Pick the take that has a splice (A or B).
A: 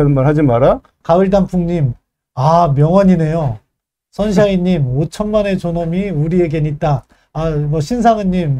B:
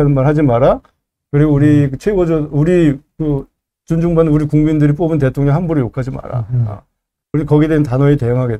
A